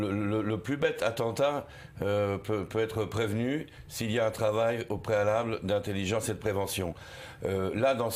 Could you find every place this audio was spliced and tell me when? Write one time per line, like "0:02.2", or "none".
0:03.3

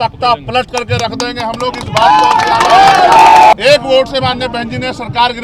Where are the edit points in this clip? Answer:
0:03.5

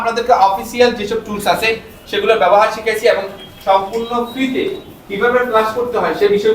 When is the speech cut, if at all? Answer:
none

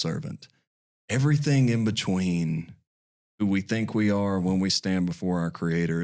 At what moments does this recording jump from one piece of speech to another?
none

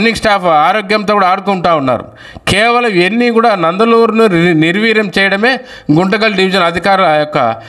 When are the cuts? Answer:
none

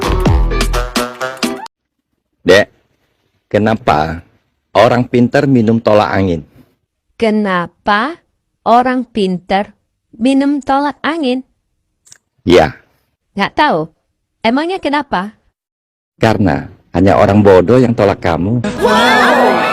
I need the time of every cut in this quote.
0:01.7

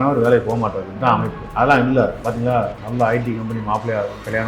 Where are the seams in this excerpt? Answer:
0:01.4

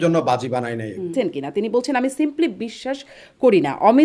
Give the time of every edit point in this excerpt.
0:01.1

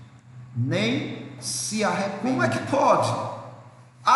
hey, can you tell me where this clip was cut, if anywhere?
0:02.2

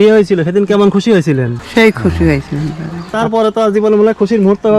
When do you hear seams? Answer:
0:03.1

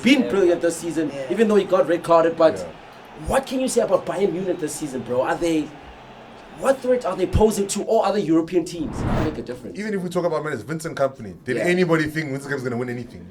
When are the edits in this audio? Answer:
0:09.2

